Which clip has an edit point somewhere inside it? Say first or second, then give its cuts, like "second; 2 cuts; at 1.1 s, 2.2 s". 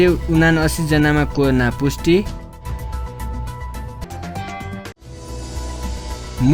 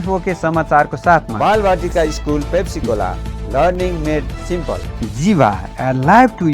second; 2 cuts; at 1.3 s, 4.9 s